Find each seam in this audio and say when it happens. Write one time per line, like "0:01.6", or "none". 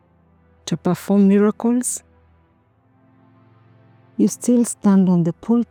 none

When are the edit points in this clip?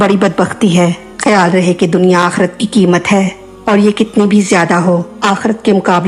0:01.1

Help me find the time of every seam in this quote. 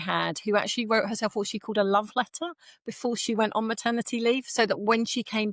none

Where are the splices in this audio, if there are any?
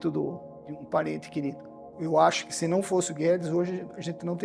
0:01.9

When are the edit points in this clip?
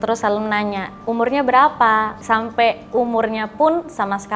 0:00.9
0:02.2

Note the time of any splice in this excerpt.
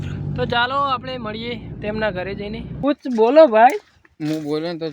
0:02.7

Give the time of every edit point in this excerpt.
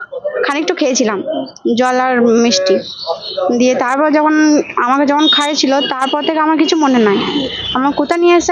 none

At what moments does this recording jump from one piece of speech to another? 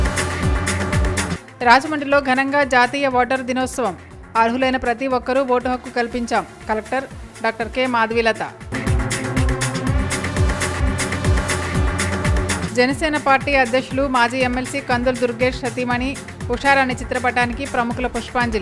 0:01.3

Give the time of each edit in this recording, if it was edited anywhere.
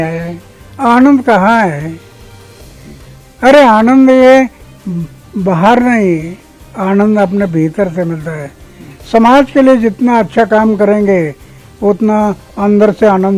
none

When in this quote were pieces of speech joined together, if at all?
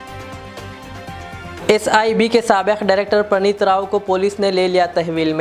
none

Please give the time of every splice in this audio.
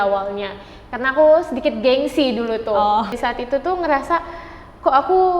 0:03.1

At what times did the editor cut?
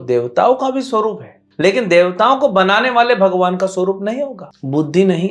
0:04.4

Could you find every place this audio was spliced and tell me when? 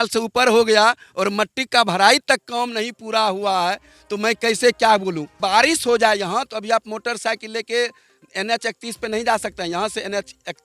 0:05.4

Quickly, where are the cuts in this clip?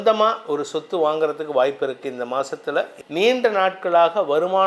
0:03.0

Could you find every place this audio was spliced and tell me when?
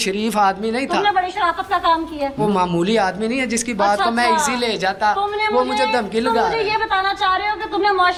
none

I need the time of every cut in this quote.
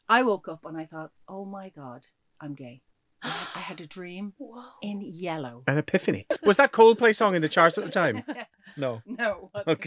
0:06.3

